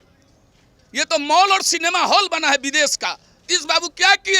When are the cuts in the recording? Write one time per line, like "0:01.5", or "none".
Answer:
0:03.4